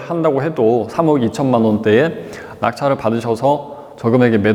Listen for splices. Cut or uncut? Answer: uncut